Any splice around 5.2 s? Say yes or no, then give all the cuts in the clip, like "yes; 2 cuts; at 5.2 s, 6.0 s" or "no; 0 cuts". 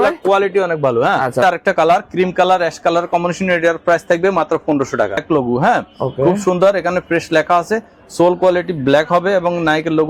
yes; 2 cuts; at 1.4 s, 5.2 s